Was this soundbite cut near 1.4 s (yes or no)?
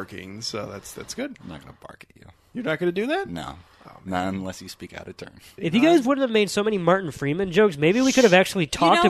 no